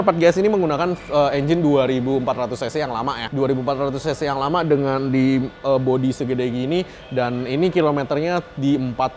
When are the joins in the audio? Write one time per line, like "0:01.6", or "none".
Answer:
none